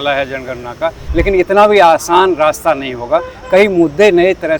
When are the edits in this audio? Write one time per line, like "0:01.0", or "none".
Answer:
0:01.0